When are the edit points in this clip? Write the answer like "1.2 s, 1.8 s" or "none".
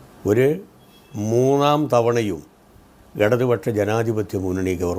none